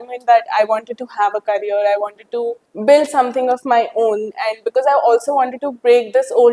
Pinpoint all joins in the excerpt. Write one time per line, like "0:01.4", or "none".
0:02.7